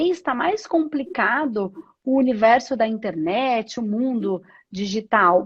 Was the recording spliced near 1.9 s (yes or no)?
no